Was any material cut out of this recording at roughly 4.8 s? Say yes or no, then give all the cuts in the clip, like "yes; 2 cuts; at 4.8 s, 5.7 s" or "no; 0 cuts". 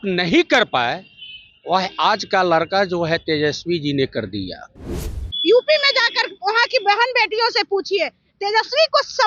yes; 1 cut; at 4.8 s